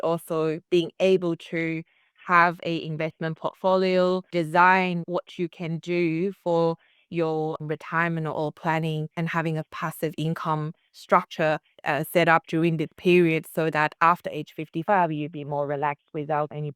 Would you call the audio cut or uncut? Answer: cut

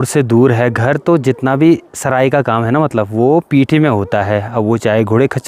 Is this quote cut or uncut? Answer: uncut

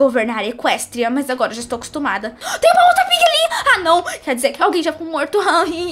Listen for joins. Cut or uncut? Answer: cut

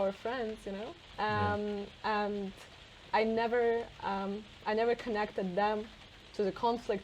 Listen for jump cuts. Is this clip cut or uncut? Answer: uncut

